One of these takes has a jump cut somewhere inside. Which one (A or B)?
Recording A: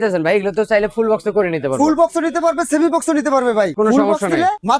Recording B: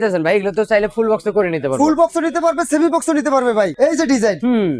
B